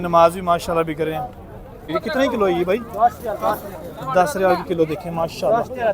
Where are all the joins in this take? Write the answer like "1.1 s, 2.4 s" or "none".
1.8 s